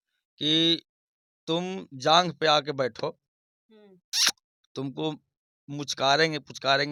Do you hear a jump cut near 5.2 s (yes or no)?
no